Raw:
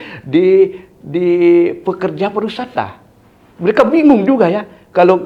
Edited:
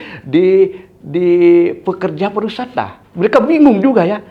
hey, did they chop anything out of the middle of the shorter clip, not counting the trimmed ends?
yes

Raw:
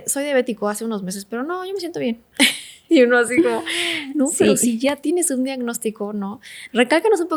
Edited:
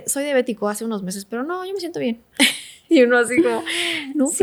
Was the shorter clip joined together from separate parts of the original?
no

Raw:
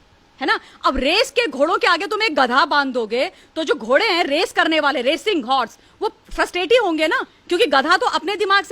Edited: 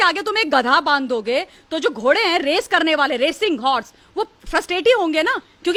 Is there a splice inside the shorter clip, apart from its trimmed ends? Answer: no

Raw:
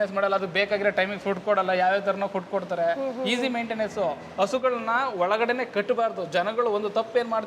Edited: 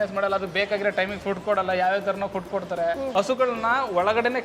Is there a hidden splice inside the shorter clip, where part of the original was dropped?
yes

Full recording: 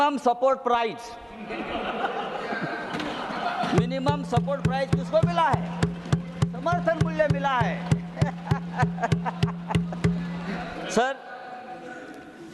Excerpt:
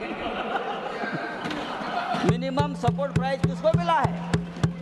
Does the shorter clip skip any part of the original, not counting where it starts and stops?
no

